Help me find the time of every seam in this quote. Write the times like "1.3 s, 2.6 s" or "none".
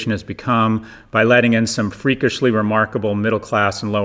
none